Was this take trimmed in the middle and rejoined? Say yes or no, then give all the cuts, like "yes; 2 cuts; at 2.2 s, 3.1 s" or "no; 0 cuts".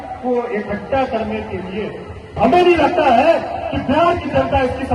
yes; 1 cut; at 2.3 s